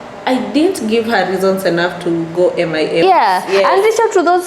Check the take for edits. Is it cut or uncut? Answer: cut